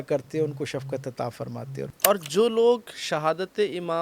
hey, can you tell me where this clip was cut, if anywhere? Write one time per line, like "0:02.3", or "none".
0:01.9